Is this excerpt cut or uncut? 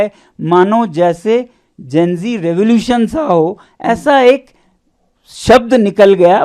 uncut